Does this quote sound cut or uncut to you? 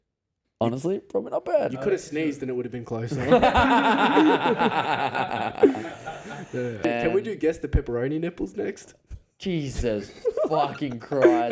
cut